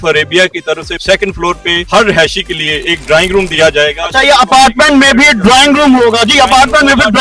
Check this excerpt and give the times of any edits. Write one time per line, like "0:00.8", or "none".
none